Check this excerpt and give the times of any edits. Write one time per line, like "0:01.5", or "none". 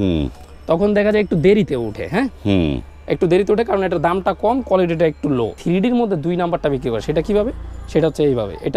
0:05.6

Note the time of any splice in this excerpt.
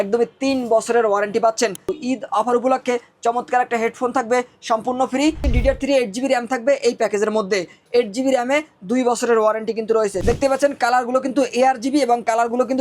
0:01.9
0:05.4
0:10.2

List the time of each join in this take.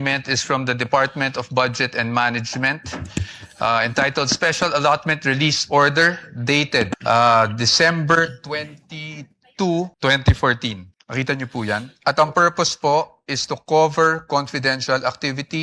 0:07.0
0:09.9
0:10.9
0:11.9

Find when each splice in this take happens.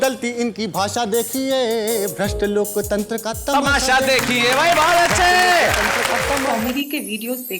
0:06.5

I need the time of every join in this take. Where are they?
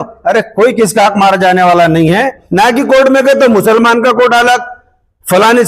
0:02.4

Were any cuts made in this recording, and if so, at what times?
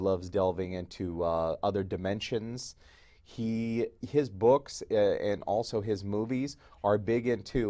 0:02.6

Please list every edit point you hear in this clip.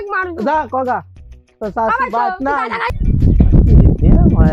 0:02.9

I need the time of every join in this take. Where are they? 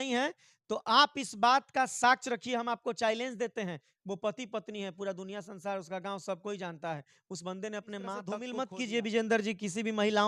0:08.5

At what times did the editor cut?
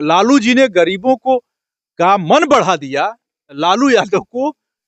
0:03.6

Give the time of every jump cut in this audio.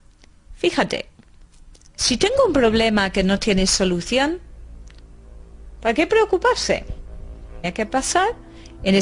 none

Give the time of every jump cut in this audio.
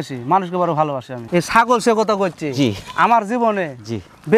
0:01.1

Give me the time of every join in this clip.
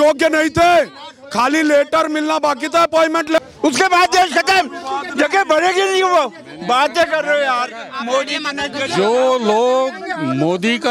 0:03.4

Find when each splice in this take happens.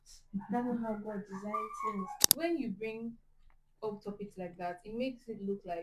0:02.2

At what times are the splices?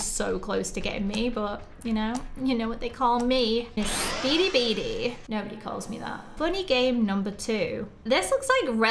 none

